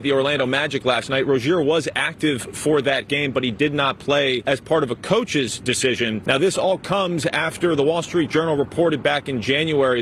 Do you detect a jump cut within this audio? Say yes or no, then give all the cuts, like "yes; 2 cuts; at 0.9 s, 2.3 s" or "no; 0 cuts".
no; 0 cuts